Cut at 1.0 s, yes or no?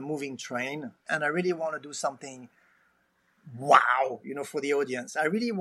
yes